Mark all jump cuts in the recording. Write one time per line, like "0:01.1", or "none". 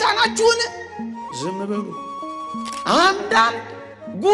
0:02.2